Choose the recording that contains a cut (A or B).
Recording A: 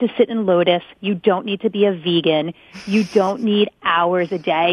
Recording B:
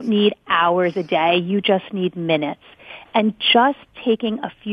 A